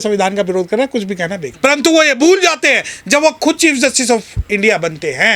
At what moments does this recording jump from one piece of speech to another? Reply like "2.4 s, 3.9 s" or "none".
1.4 s